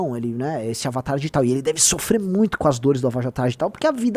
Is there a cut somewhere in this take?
no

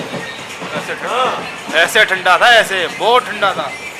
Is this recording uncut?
yes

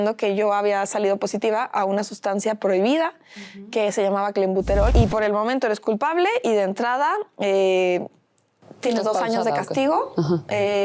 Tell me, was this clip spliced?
yes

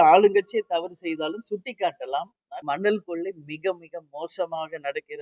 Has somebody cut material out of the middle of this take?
yes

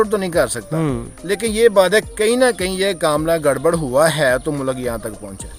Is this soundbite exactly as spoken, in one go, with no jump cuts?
yes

